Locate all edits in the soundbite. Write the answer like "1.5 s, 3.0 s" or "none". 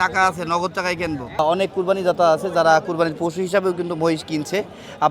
1.4 s

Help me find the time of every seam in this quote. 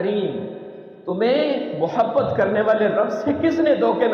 none

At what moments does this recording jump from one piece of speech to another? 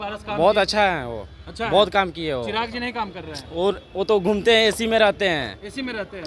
none

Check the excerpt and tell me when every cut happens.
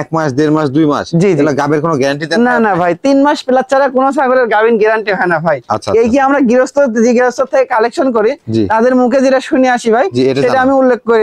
none

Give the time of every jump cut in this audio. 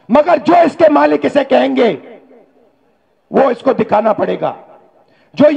none

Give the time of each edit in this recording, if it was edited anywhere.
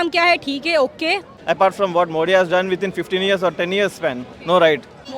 1.3 s

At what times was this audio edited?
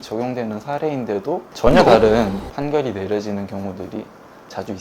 1.5 s, 2.5 s

